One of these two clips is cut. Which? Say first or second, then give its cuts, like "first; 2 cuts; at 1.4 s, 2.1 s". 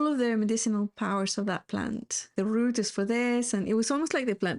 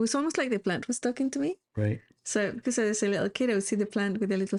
first; 1 cut; at 2.3 s